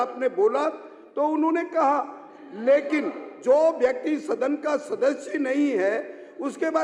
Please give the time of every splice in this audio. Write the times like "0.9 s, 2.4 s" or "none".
none